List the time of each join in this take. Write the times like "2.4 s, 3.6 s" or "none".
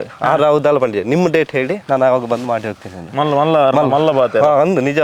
none